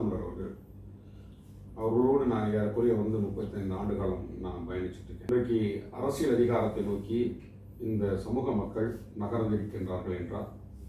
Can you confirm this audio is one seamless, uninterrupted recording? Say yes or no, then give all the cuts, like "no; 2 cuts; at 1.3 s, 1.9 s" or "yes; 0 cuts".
no; 1 cut; at 5.3 s